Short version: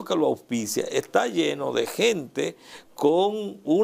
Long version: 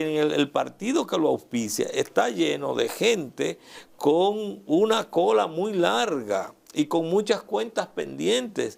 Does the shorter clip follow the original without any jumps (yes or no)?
yes